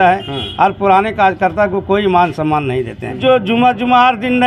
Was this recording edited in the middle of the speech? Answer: yes; 1 cut; at 3.2 s

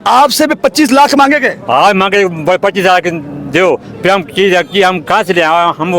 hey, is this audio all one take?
yes; 0 cuts

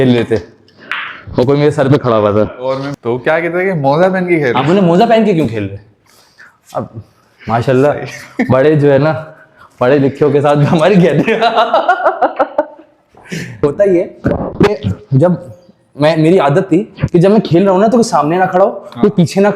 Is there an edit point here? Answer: yes; 2 cuts; at 2.9 s, 13.6 s

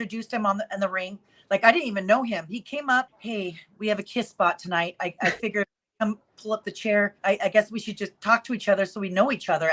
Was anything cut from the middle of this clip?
yes; 2 cuts; at 3.2 s, 7.2 s

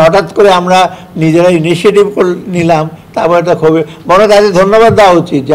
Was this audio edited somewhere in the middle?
no; 0 cuts

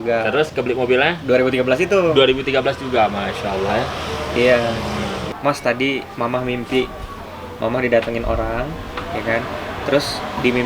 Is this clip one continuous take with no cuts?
no; 1 cut; at 5.2 s

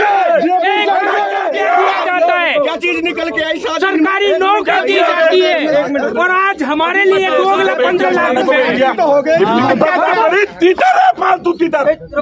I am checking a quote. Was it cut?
yes; 1 cut; at 9.7 s

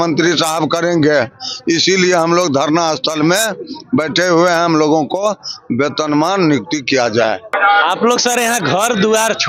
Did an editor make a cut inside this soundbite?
no; 0 cuts

